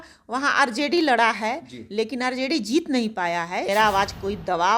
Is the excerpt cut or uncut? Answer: cut